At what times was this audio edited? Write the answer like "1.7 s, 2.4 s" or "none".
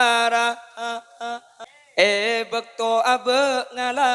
1.5 s